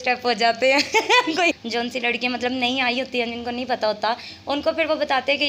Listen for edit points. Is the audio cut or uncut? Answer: cut